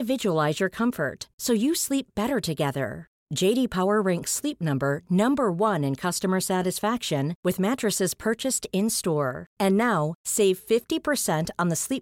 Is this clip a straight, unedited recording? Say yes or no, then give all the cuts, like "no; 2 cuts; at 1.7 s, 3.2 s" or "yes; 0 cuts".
yes; 0 cuts